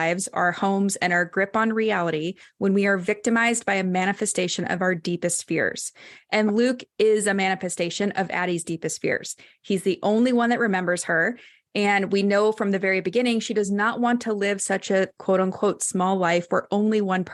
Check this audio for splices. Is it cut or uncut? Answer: uncut